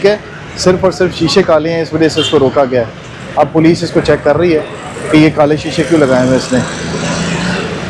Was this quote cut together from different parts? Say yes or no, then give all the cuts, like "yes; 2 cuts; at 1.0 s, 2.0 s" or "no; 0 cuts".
no; 0 cuts